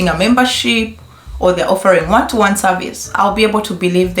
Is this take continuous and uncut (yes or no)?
yes